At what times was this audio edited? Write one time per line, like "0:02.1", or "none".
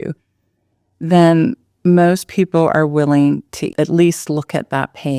0:03.6